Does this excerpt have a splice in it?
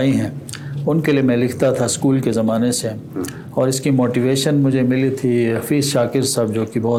no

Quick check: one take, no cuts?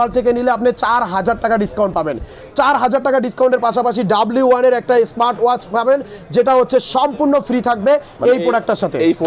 yes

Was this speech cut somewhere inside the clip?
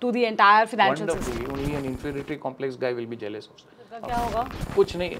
yes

